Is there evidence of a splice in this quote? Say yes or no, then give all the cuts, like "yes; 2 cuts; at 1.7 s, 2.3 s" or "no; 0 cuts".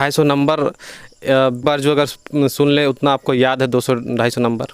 yes; 1 cut; at 1.6 s